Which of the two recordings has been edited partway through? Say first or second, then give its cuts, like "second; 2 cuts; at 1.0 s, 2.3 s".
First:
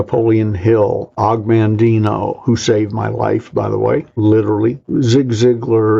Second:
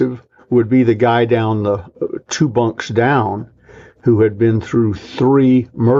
first; 3 cuts; at 1.2 s, 4.1 s, 4.8 s